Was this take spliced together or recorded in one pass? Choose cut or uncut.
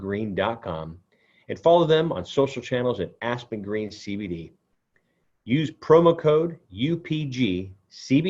uncut